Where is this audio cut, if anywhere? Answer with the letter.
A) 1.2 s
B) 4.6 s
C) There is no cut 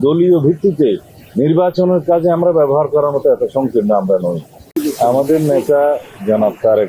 B